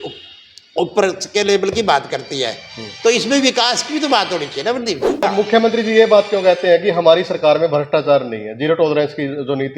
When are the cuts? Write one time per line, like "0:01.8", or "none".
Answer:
0:05.3